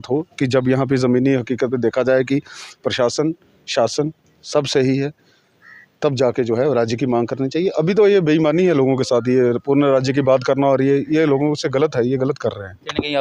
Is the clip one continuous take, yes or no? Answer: yes